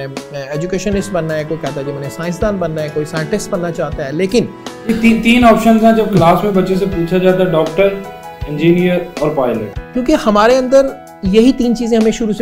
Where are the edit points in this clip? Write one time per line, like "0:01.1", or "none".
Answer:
none